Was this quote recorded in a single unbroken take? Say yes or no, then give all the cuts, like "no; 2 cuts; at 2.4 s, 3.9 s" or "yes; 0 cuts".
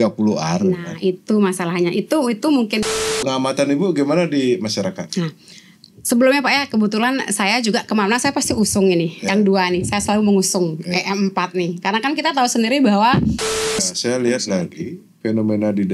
no; 2 cuts; at 2.8 s, 13.8 s